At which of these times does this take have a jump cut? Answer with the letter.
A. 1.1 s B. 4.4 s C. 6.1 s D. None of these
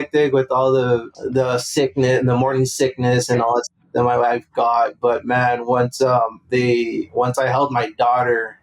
A